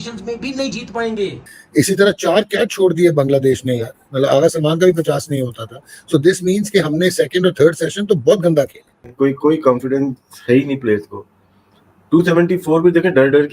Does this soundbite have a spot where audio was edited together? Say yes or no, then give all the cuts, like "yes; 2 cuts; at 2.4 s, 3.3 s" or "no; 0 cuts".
yes; 2 cuts; at 1.3 s, 9.0 s